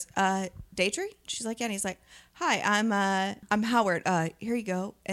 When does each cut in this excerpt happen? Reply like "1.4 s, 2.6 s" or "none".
3.4 s